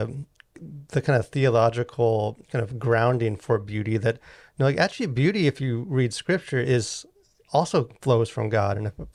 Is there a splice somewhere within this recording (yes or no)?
no